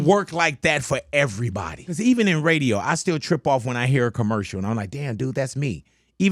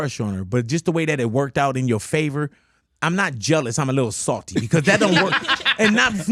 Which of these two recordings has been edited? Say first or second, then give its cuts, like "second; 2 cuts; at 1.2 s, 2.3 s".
first; 1 cut; at 2.0 s